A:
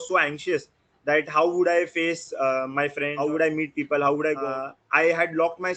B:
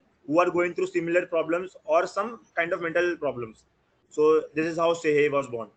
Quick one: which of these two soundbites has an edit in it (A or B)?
A